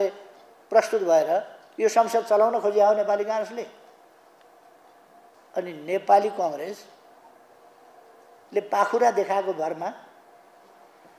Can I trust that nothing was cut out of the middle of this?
no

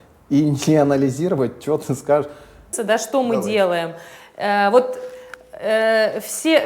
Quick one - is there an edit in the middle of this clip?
yes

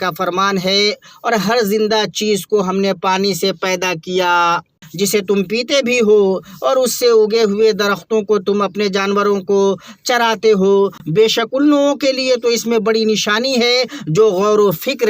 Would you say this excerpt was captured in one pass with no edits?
no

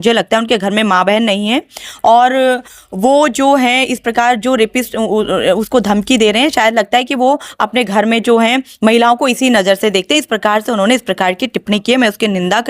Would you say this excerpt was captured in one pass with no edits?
yes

